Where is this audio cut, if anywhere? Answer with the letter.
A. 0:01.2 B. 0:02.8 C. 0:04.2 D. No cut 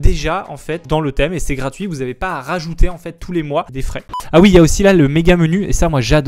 C